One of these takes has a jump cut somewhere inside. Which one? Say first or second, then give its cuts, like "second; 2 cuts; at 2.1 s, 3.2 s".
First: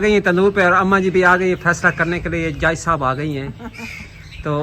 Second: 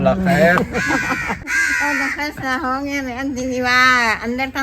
second; 1 cut; at 1.5 s